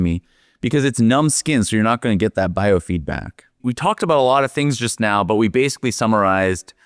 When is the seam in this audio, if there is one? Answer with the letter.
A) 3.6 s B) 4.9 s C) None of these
A